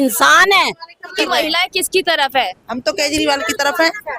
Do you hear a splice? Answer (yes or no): yes